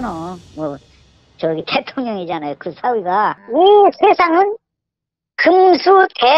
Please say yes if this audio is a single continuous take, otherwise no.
no